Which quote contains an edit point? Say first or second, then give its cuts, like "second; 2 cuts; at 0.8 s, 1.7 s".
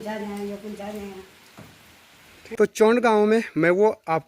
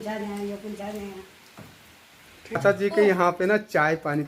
first; 1 cut; at 2.6 s